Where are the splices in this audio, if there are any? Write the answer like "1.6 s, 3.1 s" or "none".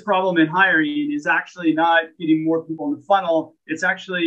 2.7 s